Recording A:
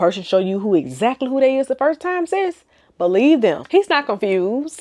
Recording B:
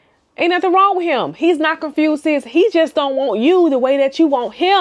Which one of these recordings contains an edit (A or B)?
A